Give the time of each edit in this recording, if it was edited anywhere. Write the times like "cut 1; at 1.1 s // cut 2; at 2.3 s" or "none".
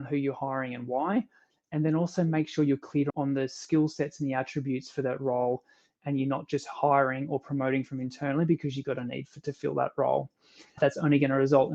cut 1; at 3.1 s